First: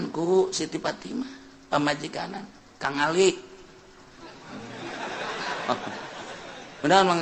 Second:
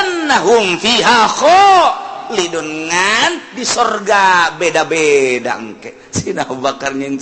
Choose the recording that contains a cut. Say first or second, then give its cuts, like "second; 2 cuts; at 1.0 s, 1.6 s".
second; 1 cut; at 5.9 s